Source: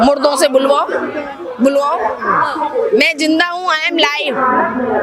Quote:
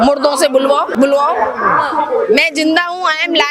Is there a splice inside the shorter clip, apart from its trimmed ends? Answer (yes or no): yes